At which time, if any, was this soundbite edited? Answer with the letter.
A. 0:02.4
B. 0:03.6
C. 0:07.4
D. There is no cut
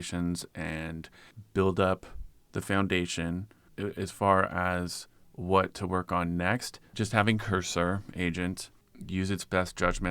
B